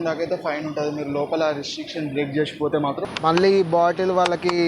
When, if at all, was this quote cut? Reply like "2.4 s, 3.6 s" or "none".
3.1 s